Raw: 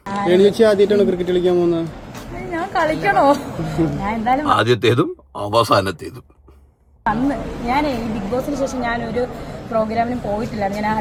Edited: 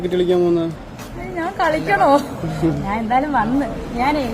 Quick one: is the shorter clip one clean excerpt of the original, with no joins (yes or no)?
no